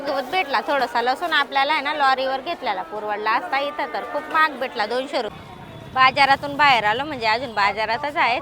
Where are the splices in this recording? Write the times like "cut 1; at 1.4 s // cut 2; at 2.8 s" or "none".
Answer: cut 1; at 5.3 s